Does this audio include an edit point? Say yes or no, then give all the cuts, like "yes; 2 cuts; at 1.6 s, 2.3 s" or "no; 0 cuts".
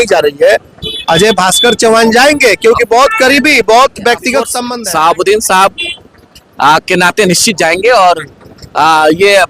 yes; 1 cut; at 4.6 s